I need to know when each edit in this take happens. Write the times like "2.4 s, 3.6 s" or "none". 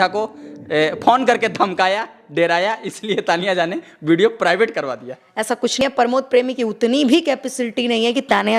5.8 s